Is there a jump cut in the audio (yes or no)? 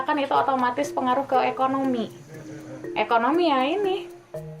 no